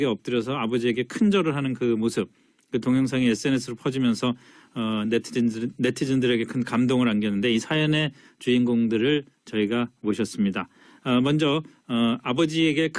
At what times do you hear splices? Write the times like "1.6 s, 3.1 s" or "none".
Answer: none